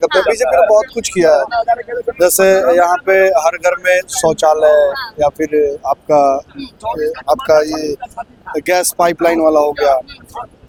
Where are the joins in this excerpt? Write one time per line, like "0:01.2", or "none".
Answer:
none